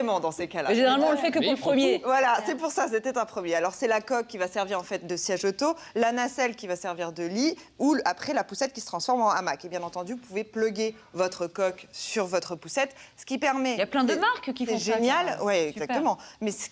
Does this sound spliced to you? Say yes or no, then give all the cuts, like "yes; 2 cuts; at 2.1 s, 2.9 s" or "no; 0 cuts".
yes; 1 cut; at 9.1 s